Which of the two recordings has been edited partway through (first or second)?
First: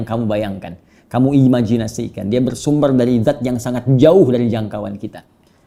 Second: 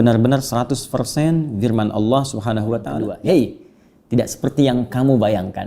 second